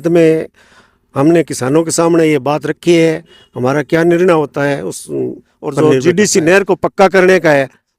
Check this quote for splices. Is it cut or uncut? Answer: cut